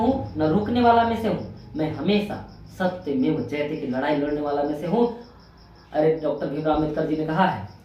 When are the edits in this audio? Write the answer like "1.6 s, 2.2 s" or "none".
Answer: none